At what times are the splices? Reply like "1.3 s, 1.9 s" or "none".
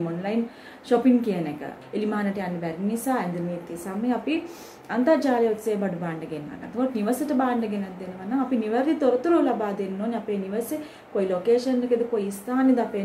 1.8 s